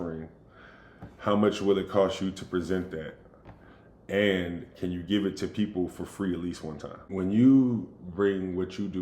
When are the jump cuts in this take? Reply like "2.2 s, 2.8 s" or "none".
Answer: 7.1 s